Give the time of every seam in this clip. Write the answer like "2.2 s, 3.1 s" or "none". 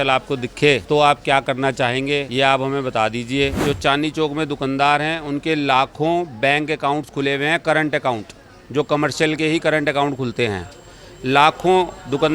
0.8 s, 2.3 s, 3.6 s